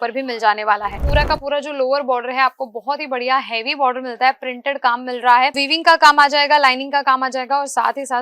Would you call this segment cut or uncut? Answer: cut